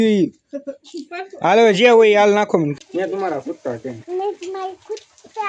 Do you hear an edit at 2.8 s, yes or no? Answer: yes